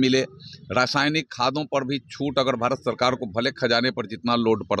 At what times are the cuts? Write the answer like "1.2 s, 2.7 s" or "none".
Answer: none